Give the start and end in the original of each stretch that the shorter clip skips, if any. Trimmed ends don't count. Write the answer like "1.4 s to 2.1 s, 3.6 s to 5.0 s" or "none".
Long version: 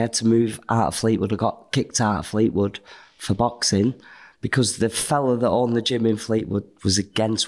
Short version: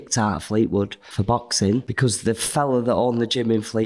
2.9 s to 3.2 s, 4.0 s to 4.4 s